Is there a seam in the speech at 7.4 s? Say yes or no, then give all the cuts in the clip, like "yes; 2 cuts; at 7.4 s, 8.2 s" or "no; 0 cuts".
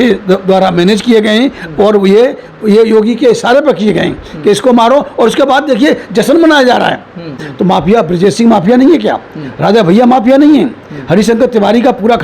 yes; 1 cut; at 7.4 s